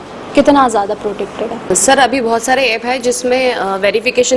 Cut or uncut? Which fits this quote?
cut